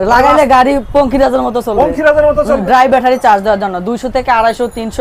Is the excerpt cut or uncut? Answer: cut